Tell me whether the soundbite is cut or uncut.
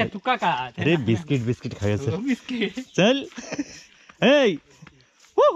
uncut